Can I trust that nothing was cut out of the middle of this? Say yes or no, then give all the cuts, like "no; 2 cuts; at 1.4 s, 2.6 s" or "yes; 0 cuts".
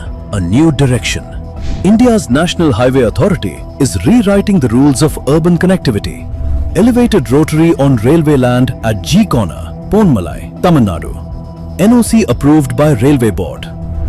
yes; 0 cuts